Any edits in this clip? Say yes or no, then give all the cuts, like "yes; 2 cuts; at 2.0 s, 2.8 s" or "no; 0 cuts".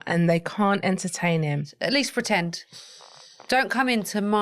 yes; 1 cut; at 1.7 s